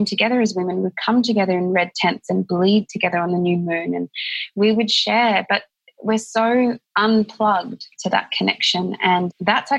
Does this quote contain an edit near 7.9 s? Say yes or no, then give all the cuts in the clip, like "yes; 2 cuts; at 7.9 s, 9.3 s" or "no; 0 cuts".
yes; 2 cuts; at 6.9 s, 7.9 s